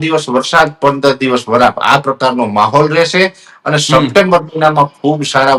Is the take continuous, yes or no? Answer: yes